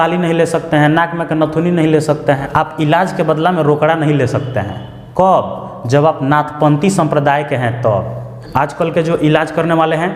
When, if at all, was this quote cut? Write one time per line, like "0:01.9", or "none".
0:02.4
0:08.3

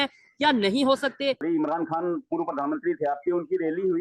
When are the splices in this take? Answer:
0:01.4

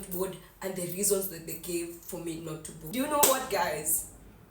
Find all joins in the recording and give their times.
0:02.8

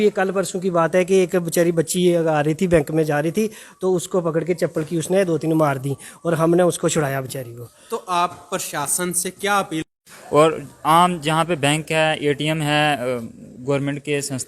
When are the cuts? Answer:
0:09.9

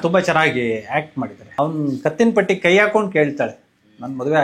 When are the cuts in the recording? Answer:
0:01.4

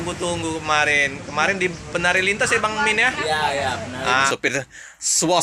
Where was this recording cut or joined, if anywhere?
0:04.3

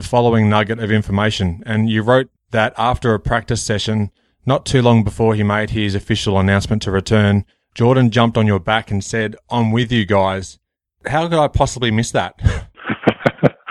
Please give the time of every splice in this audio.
0:02.4

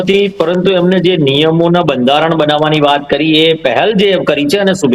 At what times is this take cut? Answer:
none

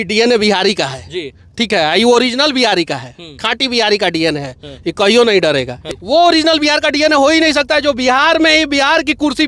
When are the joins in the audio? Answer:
0:05.8

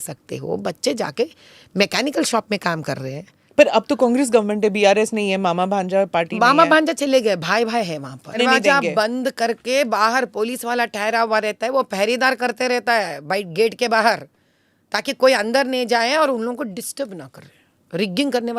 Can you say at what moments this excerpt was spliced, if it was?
0:03.3
0:08.4

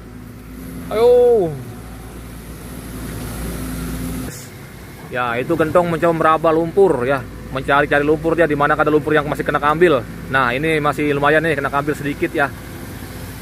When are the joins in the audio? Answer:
0:04.5

